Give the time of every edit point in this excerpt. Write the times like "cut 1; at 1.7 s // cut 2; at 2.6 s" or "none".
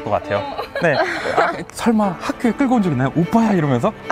cut 1; at 1.6 s